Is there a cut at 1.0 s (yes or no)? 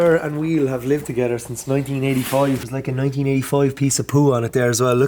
no